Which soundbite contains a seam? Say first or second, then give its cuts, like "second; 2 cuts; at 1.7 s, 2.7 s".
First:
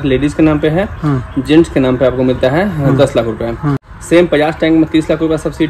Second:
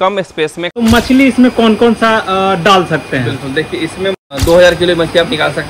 second; 2 cuts; at 0.8 s, 4.2 s